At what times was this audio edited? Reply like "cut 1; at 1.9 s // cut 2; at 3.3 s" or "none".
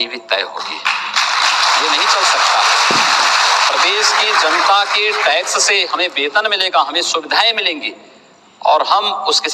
none